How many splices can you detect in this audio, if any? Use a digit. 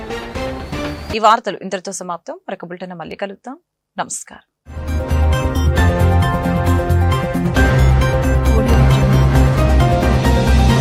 0